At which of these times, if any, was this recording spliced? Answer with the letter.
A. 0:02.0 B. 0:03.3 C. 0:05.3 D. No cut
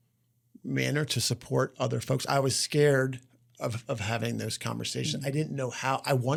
D